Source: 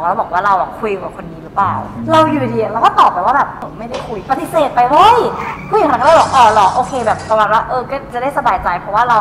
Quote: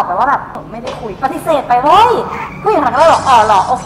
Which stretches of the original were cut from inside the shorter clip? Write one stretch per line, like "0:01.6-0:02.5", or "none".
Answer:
none